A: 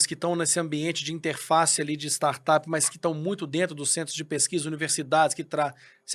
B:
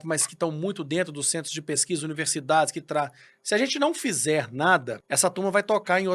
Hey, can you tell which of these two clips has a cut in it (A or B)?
B